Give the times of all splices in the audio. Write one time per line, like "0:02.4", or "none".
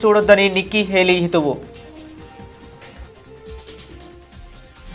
0:01.7